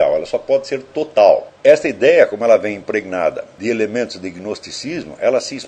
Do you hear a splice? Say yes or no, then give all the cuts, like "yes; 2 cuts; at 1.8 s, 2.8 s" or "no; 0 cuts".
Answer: yes; 2 cuts; at 1.5 s, 3.5 s